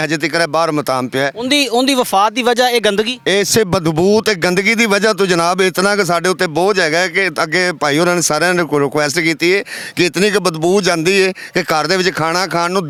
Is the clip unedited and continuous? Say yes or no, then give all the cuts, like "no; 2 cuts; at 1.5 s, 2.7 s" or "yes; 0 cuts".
yes; 0 cuts